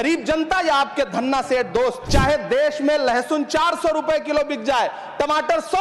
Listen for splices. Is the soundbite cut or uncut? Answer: cut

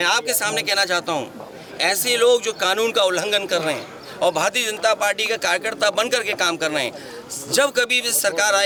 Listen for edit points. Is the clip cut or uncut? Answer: uncut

